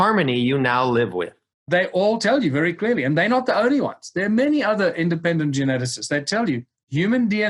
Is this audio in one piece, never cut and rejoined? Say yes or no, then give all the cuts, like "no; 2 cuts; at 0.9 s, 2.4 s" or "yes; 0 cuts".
no; 1 cut; at 1.6 s